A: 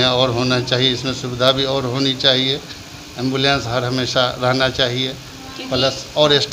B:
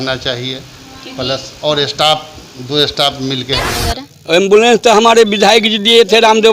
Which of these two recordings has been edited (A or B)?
B